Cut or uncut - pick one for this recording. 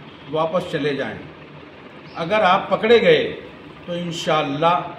uncut